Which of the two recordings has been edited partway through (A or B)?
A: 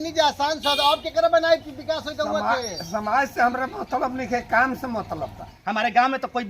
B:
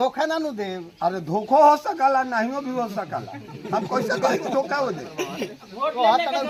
A